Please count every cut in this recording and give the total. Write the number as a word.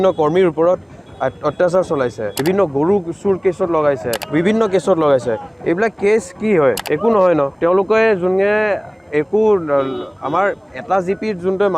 four